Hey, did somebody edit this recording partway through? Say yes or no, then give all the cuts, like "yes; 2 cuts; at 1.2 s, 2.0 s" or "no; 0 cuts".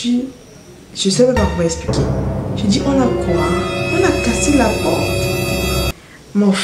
no; 0 cuts